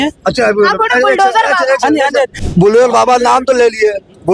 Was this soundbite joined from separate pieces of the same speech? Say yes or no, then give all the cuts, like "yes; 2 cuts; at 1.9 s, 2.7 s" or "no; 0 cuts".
yes; 1 cut; at 2.4 s